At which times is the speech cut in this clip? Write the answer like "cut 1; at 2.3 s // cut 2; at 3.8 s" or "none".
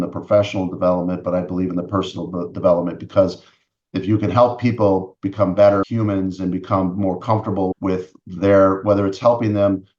cut 1; at 5.8 s // cut 2; at 7.7 s